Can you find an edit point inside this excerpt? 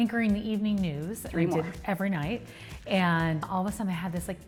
no; 0 cuts

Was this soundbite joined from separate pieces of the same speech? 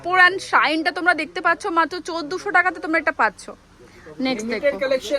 no; 0 cuts

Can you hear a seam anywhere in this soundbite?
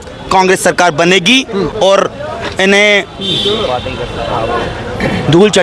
no; 0 cuts

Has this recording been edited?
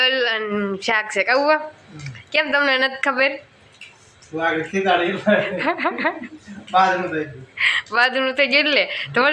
no; 0 cuts

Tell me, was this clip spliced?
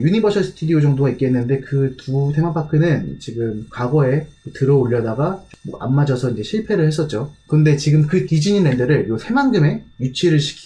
no; 0 cuts

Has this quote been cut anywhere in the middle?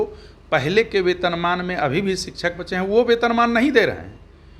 no; 0 cuts

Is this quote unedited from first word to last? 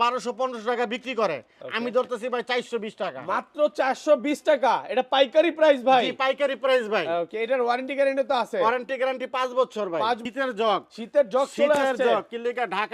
no; 1 cut; at 10.2 s

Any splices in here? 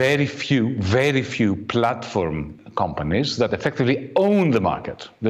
no; 0 cuts

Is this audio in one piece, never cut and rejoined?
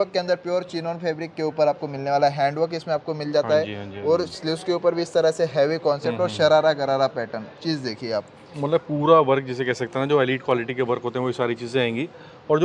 yes; 0 cuts

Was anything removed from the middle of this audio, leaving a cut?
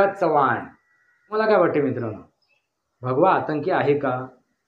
yes; 1 cut; at 1.3 s

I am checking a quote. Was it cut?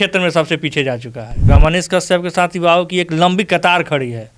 yes; 1 cut; at 1.5 s

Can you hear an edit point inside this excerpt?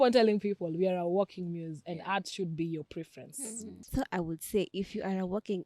yes; 1 cut; at 3.8 s

